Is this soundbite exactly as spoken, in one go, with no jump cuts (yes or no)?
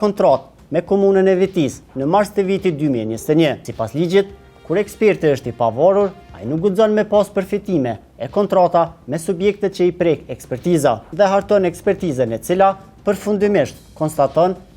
no